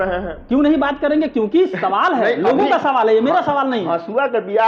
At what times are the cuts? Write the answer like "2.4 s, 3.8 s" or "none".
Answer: none

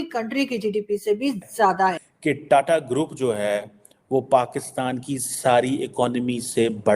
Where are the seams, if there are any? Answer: 2.1 s

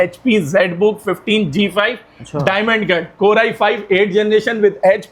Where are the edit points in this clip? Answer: none

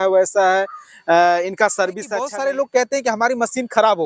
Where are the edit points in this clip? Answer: 2.3 s

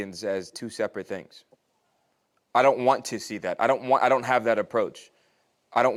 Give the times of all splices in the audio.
none

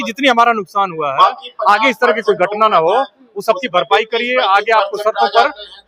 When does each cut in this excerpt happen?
none

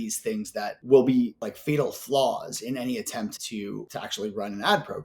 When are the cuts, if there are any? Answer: 0.8 s, 1.4 s, 3.6 s

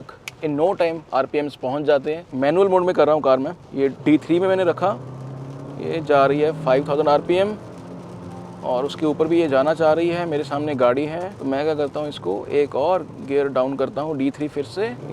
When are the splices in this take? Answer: 2.2 s

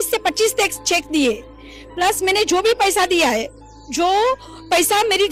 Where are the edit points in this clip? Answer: none

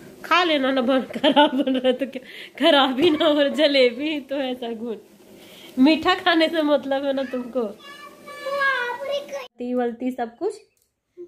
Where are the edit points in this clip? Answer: 9.5 s

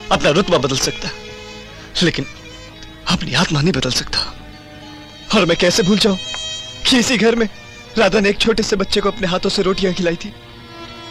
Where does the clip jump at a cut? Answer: none

